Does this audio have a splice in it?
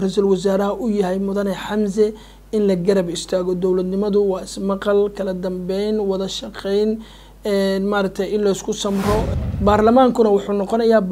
yes; 1 cut; at 9.3 s

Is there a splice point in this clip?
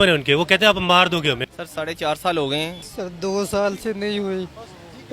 yes; 2 cuts; at 1.4 s, 2.8 s

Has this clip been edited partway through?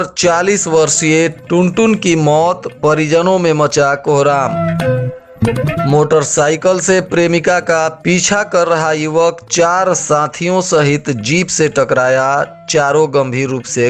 no; 0 cuts

